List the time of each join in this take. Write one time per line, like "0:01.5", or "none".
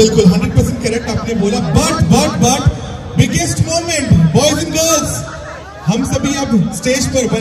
none